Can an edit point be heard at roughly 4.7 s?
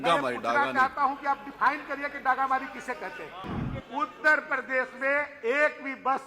no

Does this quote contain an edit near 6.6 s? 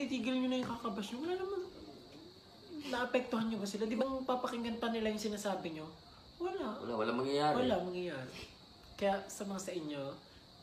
no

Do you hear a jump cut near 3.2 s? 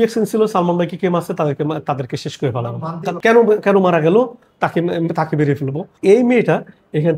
yes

